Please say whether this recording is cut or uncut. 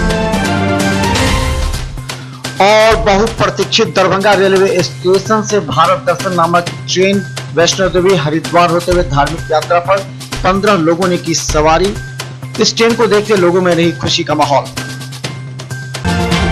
uncut